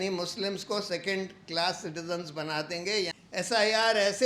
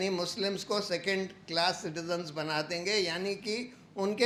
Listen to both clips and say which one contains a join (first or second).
first